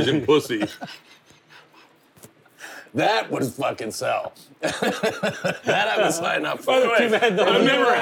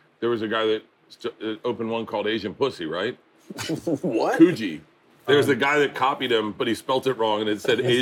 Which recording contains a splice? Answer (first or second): second